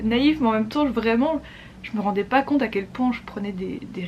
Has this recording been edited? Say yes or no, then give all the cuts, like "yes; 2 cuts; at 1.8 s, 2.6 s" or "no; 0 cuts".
no; 0 cuts